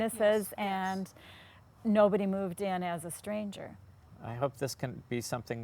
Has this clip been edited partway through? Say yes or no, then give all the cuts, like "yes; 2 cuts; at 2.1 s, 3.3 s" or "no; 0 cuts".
yes; 1 cut; at 4.0 s